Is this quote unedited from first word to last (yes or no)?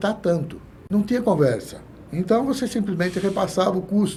yes